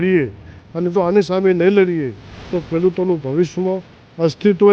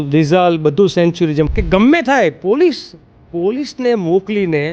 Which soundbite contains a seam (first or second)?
second